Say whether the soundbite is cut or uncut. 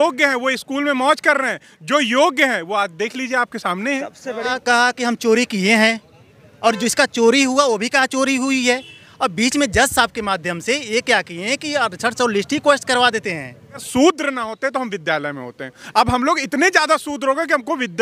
cut